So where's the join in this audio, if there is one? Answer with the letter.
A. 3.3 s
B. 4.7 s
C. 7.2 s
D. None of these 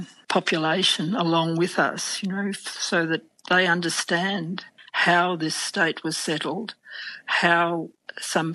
B